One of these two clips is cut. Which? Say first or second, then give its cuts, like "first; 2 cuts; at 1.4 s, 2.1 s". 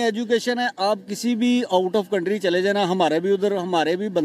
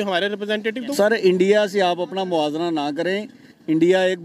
second; 1 cut; at 0.9 s